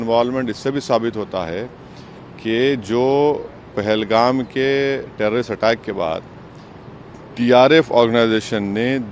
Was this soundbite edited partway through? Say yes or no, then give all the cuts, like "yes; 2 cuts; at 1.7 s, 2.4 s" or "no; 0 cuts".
no; 0 cuts